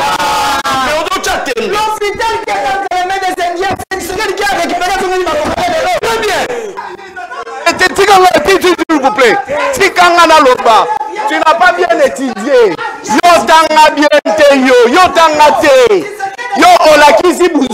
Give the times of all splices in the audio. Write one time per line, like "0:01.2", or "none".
0:06.7